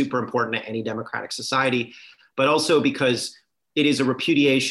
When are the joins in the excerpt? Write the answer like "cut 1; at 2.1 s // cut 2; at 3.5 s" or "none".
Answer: none